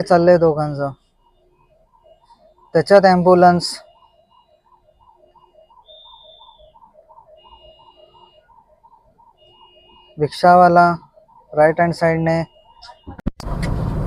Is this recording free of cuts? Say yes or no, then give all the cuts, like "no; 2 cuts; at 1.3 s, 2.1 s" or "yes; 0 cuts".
no; 1 cut; at 13.2 s